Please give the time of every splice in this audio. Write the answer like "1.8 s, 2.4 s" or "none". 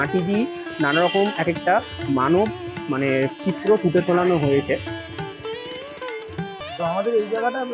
6.7 s